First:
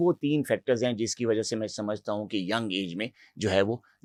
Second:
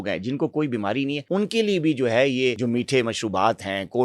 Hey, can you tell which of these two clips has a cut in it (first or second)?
second